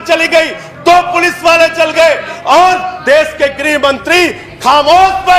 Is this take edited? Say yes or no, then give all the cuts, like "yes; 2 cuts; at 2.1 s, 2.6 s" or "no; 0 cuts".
yes; 1 cut; at 2.6 s